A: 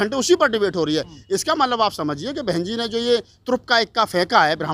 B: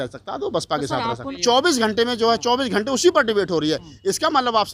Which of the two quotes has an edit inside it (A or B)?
B